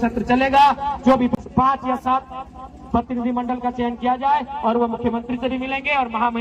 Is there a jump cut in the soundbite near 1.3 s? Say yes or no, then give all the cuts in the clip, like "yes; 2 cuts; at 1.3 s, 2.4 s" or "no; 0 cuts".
yes; 1 cut; at 1.3 s